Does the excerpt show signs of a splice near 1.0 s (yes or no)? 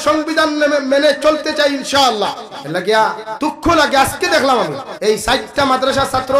no